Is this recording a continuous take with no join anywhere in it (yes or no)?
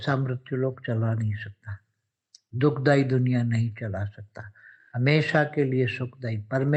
yes